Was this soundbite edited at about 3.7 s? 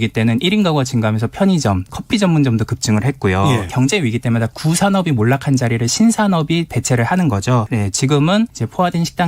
yes; 3 cuts; at 1.9 s, 3.7 s, 7.6 s

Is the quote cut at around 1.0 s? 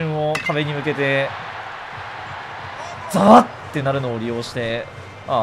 no; 0 cuts

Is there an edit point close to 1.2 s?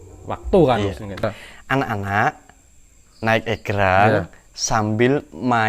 yes; 1 cut; at 1.2 s

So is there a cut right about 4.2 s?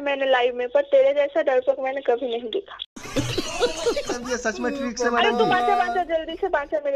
yes; 1 cut; at 4.2 s

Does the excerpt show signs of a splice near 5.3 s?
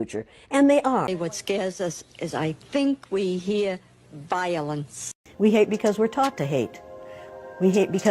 yes; 2 cuts; at 1.1 s, 5.3 s

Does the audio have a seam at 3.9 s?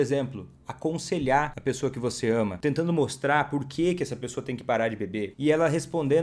no; 3 cuts; at 1.5 s, 2.5 s, 5.3 s

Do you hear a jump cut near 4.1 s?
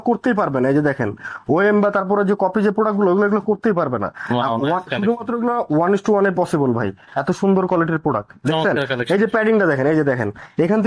no; 0 cuts

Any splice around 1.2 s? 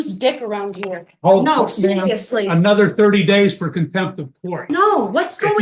no; 1 cut; at 4.5 s

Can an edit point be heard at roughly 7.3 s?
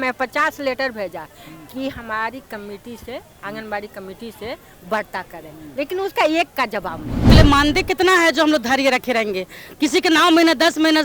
yes; 1 cut; at 7.3 s

